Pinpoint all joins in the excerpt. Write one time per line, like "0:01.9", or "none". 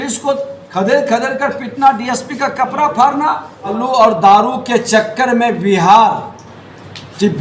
0:03.8